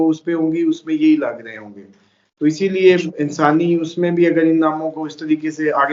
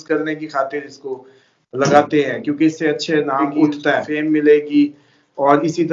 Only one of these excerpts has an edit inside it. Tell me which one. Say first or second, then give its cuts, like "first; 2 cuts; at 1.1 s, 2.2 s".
second; 1 cut; at 4.1 s